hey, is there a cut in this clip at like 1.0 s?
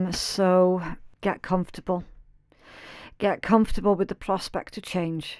yes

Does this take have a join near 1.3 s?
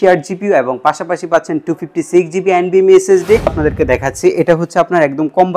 no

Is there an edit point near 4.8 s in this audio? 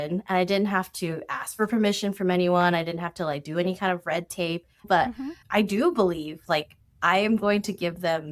yes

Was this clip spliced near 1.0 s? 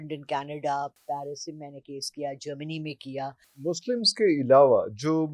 no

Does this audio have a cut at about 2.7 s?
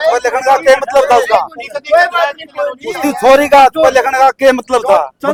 no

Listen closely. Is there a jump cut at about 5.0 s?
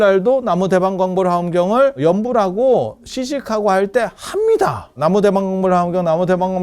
yes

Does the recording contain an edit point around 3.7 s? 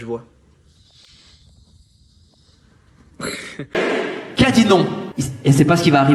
yes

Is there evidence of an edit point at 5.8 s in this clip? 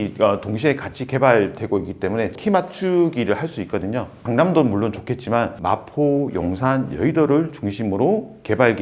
no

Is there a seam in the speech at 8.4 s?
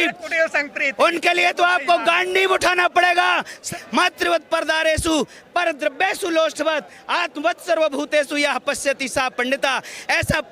no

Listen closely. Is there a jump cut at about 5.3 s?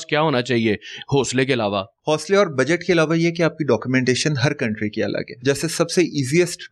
yes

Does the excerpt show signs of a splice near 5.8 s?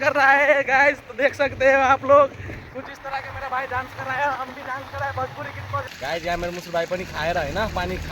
yes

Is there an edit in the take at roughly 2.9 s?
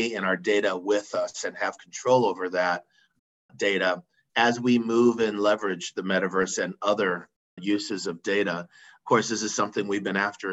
no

